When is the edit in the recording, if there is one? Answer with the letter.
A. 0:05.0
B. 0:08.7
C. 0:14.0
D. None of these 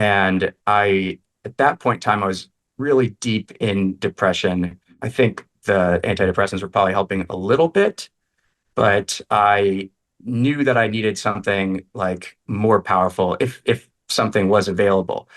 A